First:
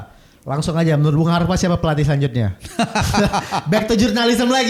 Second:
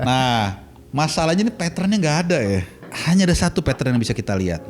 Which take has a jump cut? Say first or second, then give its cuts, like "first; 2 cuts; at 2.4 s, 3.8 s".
second; 1 cut; at 2.9 s